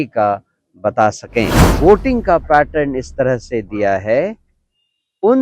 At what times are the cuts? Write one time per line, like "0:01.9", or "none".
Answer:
0:01.6